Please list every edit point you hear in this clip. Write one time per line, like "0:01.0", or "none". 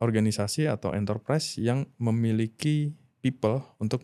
none